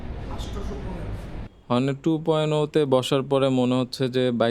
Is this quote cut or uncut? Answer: cut